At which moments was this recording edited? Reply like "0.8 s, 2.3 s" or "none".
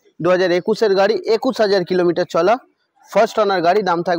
none